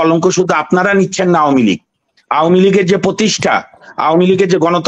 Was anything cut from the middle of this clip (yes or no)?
no